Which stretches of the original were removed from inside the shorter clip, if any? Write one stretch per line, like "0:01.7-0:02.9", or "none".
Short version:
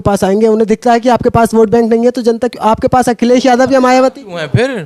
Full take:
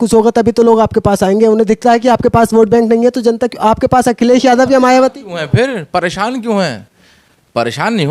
none